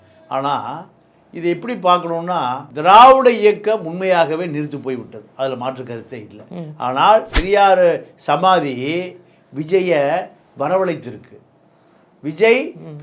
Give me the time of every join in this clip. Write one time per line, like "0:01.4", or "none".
0:07.4